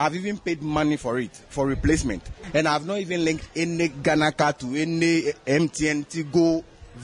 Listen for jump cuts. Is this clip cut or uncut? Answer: cut